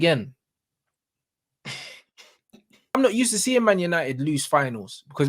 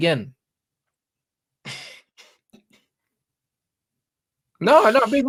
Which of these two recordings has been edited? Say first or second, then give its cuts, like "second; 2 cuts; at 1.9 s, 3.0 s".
first; 1 cut; at 3.0 s